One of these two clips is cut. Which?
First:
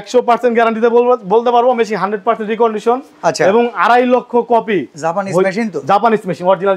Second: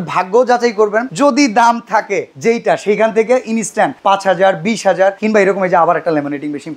second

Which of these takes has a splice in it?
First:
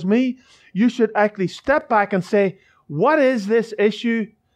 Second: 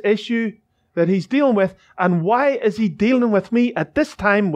first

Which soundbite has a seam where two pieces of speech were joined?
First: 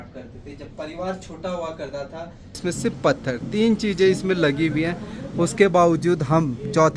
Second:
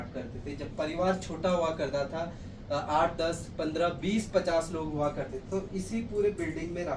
first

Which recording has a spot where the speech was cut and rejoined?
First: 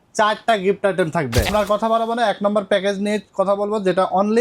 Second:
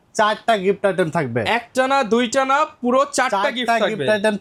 first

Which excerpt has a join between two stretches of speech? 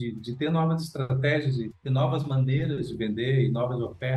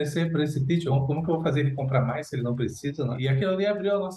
second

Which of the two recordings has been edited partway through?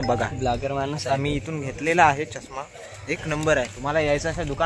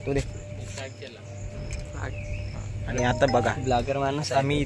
first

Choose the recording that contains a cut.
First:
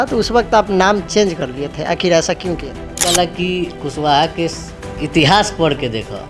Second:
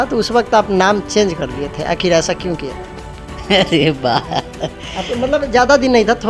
first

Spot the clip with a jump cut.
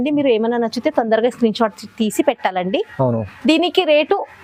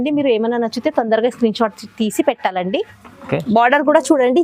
second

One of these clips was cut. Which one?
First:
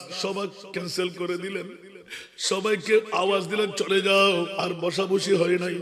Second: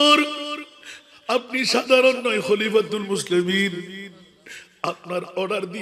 first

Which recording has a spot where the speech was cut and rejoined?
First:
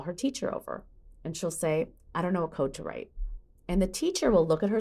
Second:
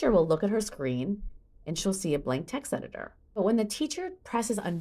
second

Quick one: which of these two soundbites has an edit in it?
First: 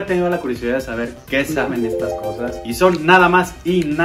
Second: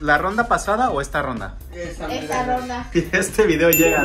second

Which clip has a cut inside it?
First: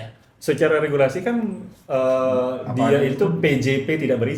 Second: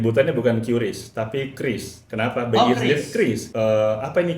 second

